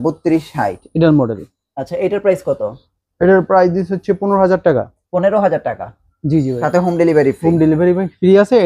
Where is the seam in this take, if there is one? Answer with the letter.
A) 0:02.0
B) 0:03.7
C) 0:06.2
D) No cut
D